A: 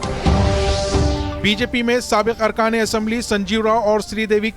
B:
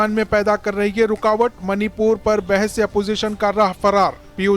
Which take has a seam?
A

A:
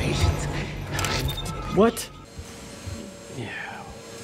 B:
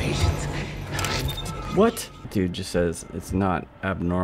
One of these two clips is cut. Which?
A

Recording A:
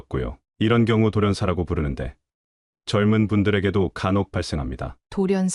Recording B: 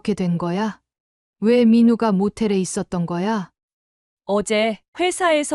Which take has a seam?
B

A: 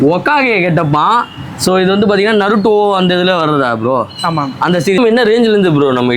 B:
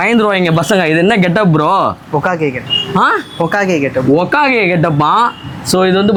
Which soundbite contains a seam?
A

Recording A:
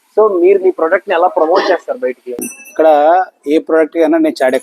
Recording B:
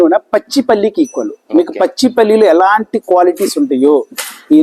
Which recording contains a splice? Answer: A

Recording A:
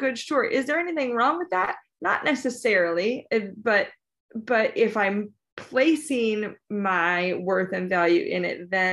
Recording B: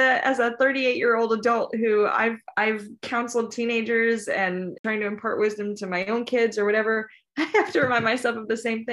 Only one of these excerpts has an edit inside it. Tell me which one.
B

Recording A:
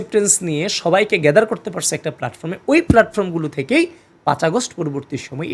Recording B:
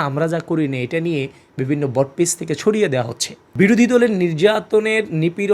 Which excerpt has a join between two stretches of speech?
B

